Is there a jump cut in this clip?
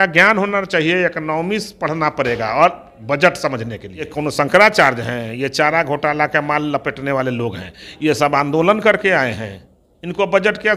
yes; 1 cut; at 4.1 s

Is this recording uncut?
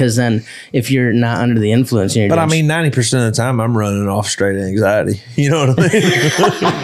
yes; 0 cuts

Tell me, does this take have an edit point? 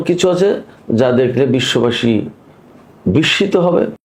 no; 0 cuts

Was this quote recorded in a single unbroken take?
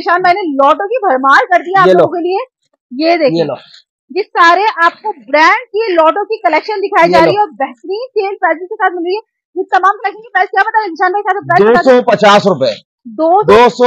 yes; 0 cuts

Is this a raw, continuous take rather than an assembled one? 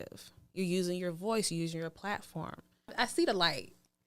no; 1 cut; at 2.9 s

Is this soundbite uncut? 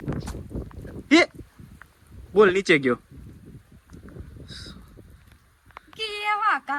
yes; 0 cuts

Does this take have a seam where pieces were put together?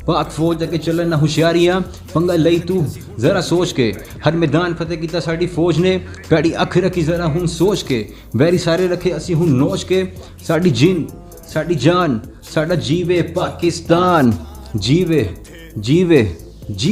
no; 0 cuts

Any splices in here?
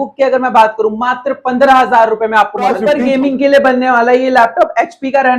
yes; 1 cut; at 2.8 s

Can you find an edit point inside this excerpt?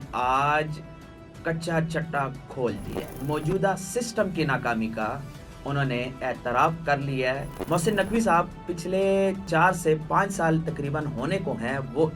yes; 3 cuts; at 3.1 s, 7.5 s, 9.5 s

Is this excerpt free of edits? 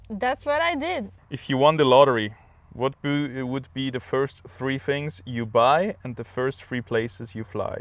no; 1 cut; at 1.1 s

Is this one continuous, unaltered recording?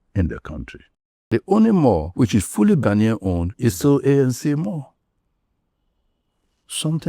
no; 1 cut; at 1.3 s

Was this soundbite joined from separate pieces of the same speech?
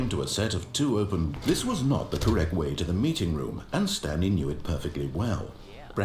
yes; 1 cut; at 1.3 s

